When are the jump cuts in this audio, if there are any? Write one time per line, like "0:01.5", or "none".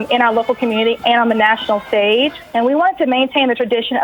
0:02.4